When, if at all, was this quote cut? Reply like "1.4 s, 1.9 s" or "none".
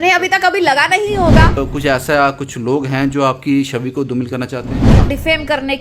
1.6 s, 5.1 s

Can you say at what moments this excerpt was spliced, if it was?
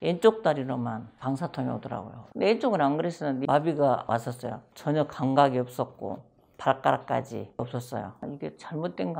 3.5 s, 4.0 s, 8.2 s

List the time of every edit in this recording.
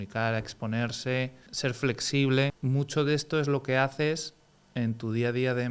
1.4 s, 2.6 s

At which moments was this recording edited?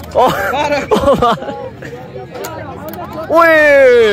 none

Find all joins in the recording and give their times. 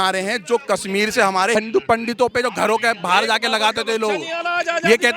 1.6 s

